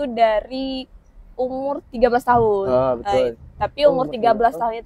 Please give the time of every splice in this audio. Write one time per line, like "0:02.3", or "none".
none